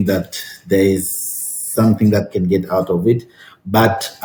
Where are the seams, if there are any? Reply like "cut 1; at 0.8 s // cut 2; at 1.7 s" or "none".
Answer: none